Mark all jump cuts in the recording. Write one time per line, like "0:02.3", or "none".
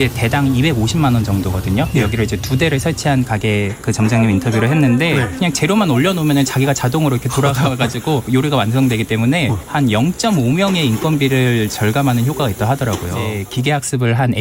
0:05.3
0:08.3
0:13.3